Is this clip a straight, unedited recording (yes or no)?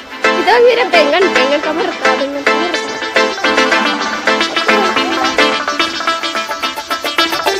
yes